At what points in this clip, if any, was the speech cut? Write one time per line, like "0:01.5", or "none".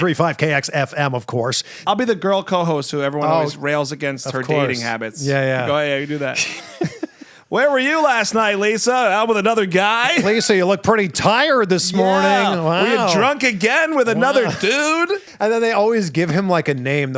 0:01.7
0:15.3